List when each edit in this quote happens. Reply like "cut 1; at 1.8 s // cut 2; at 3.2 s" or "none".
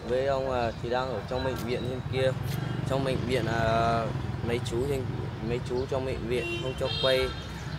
none